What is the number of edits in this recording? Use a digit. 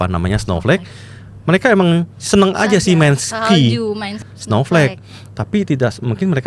1